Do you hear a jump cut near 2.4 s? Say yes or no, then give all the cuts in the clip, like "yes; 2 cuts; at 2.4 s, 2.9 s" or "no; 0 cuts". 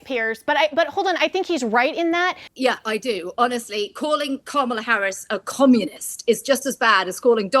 yes; 1 cut; at 2.4 s